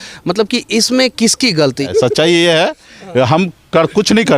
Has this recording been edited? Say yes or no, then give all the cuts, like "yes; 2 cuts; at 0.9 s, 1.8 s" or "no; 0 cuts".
yes; 1 cut; at 1.9 s